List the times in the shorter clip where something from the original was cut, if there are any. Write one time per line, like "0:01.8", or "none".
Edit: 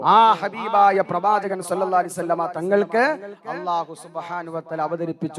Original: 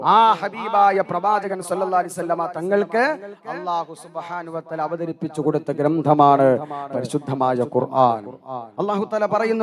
none